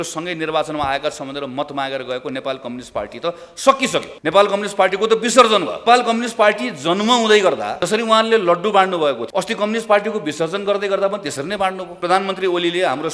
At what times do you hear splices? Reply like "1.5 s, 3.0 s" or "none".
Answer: 4.1 s, 5.8 s, 7.7 s, 9.2 s, 11.9 s

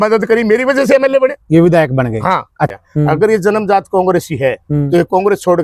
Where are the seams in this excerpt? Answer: 2.7 s

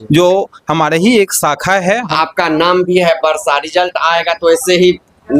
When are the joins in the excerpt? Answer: 2.1 s

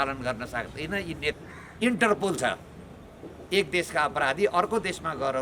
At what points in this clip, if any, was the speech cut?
1.3 s

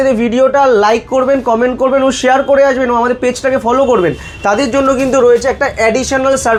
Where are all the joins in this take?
none

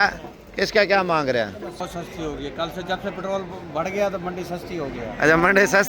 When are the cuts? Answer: 1.8 s

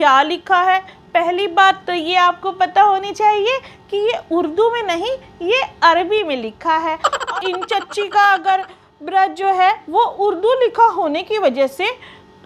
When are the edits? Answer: 7.1 s

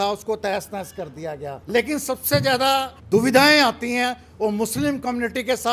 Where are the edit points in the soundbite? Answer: 1.5 s, 3.0 s

